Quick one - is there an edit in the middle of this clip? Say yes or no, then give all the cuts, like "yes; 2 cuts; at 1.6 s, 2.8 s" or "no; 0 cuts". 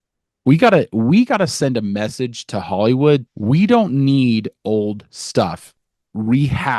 yes; 1 cut; at 3.3 s